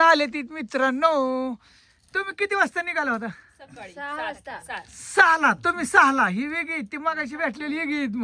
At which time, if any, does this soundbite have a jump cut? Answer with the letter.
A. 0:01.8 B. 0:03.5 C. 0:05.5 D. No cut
D